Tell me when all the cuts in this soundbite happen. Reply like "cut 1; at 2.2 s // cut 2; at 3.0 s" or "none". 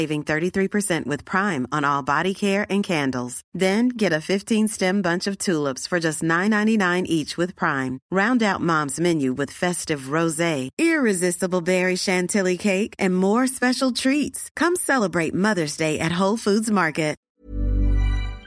cut 1; at 17.2 s